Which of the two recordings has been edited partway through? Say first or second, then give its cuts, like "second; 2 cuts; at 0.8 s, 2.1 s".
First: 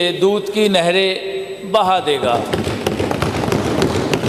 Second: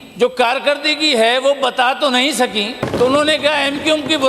second; 1 cut; at 2.8 s